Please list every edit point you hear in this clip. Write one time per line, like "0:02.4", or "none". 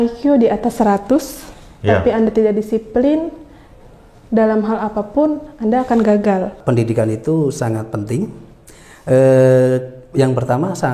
0:06.6